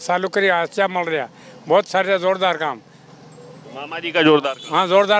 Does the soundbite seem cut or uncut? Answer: uncut